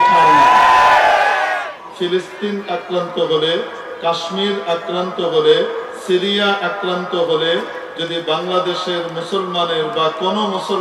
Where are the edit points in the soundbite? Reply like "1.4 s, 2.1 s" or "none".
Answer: 1.8 s

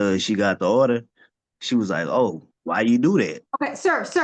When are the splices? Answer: 2.5 s

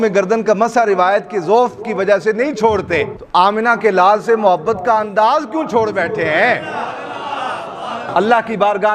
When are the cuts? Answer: 3.2 s, 8.1 s

